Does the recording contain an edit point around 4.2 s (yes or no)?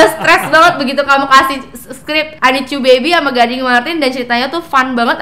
no